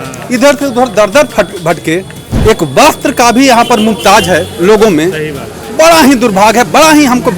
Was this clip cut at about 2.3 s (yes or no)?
yes